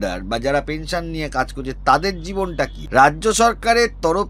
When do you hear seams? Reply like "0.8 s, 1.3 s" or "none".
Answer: 2.8 s

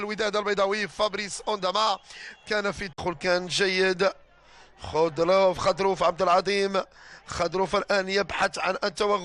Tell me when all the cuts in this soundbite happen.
none

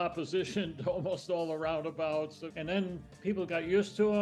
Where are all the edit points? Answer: 2.5 s

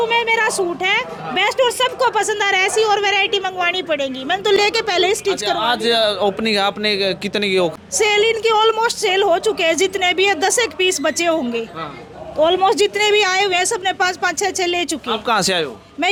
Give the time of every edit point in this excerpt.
none

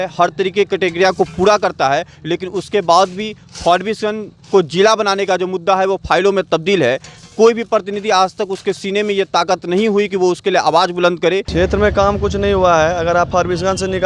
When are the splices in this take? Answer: 11.5 s

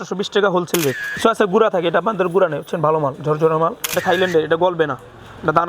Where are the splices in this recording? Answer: 1.1 s, 3.9 s

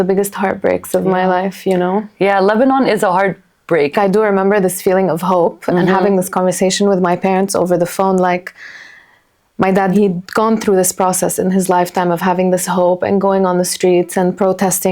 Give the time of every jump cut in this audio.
3.9 s, 9.9 s

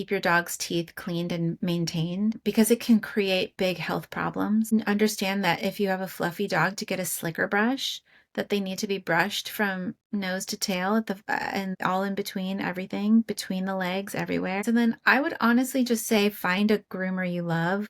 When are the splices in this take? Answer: 2.4 s, 4.7 s, 14.6 s

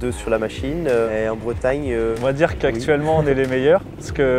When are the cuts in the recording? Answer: 1.1 s, 2.2 s

